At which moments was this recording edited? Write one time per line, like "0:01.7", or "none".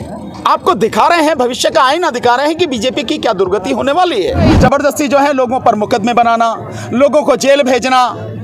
0:04.5